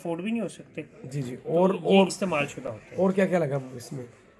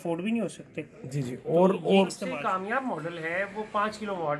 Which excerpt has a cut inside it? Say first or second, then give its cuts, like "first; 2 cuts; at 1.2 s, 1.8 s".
second; 1 cut; at 2.2 s